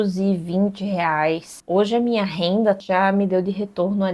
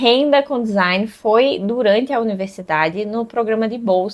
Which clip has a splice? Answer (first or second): first